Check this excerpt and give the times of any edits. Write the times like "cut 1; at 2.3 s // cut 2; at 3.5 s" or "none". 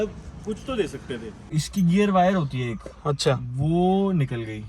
cut 1; at 1.6 s